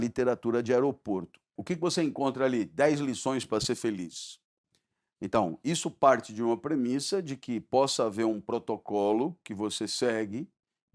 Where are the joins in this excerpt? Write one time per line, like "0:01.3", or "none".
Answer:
0:01.6